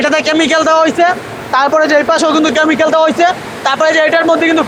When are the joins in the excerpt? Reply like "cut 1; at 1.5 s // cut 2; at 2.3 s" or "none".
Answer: none